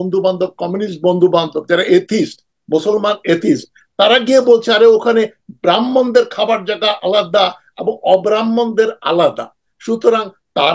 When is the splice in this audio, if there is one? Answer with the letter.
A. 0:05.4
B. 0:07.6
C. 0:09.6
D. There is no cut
D